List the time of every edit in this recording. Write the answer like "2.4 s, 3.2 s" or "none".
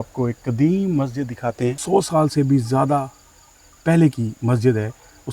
1.8 s